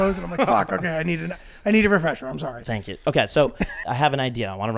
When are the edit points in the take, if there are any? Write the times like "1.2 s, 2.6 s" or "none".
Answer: 3.9 s